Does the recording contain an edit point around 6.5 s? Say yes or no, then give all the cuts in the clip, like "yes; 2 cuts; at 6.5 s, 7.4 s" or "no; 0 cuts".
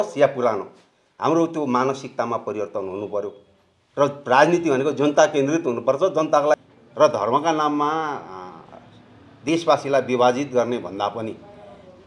yes; 1 cut; at 6.5 s